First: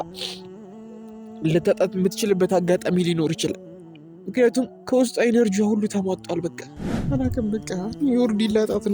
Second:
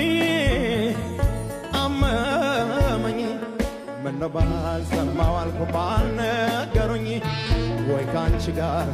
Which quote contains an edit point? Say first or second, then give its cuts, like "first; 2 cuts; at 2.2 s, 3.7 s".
first; 1 cut; at 7.0 s